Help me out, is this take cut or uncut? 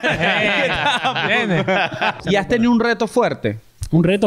cut